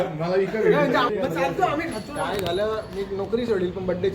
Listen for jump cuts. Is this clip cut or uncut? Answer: cut